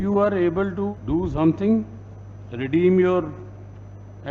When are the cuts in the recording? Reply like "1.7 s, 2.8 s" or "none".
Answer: 0.9 s